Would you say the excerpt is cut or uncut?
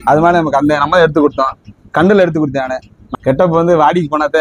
cut